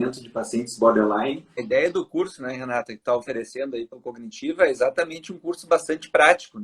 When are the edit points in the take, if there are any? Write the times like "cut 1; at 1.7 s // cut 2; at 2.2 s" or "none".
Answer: cut 1; at 1.6 s